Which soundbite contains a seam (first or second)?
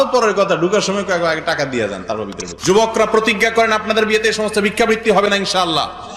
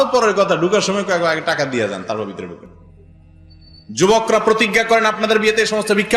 first